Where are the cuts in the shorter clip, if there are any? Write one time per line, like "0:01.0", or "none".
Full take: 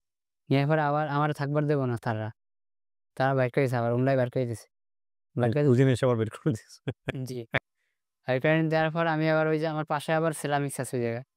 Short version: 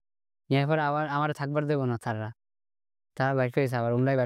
none